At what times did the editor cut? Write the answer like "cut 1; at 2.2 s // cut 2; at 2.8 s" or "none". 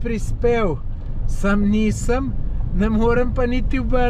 none